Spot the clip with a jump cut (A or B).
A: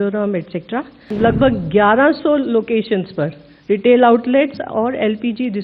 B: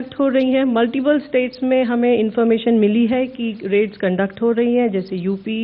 A